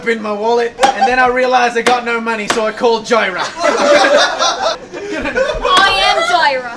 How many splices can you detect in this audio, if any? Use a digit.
0